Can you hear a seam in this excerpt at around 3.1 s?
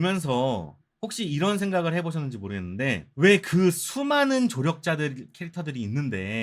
yes; 1 cut; at 3.1 s

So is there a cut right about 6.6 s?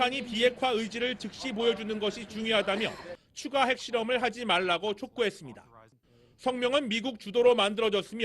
yes; 1 cut; at 6.6 s

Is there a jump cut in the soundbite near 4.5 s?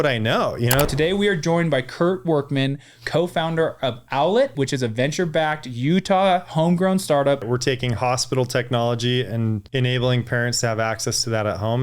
yes; 4 cuts; at 0.9 s, 4.5 s, 7.4 s, 9.6 s

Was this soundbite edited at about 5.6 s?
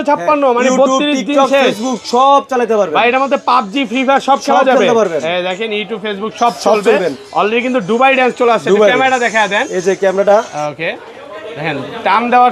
no; 0 cuts

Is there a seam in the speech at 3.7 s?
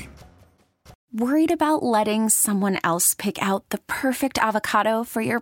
no; 1 cut; at 0.9 s

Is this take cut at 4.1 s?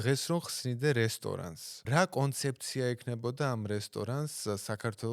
no; 1 cut; at 1.7 s

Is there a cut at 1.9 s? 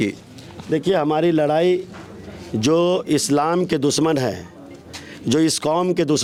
no; 0 cuts

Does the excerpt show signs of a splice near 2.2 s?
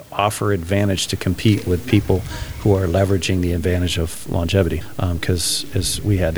no; 0 cuts

